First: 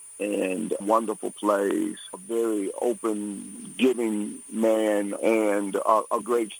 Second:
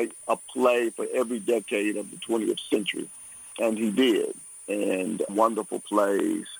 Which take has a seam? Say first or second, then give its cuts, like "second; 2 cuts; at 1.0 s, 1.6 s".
second; 1 cut; at 3.5 s